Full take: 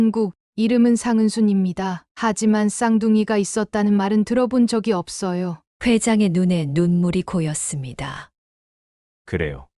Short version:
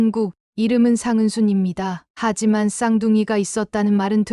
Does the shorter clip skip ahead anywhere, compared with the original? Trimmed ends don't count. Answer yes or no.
no